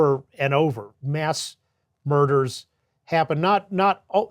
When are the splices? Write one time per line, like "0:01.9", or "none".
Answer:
0:00.9